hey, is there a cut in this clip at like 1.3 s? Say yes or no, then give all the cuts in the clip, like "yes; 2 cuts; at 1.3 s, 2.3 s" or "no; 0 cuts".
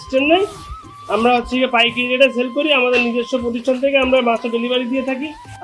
no; 0 cuts